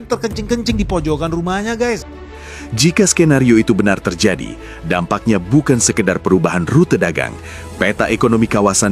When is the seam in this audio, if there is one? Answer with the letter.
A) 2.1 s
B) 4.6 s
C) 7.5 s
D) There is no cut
A